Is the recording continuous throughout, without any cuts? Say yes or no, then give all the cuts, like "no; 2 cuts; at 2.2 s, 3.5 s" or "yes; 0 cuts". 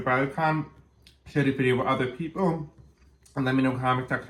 yes; 0 cuts